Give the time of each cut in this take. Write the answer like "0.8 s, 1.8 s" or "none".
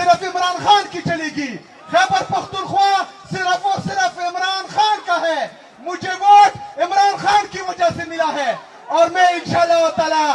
none